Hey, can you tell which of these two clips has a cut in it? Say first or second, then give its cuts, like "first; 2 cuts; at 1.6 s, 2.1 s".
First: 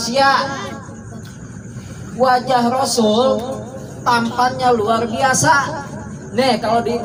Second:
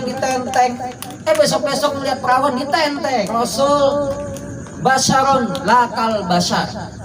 second; 1 cut; at 3.4 s